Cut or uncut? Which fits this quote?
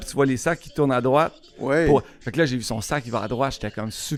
uncut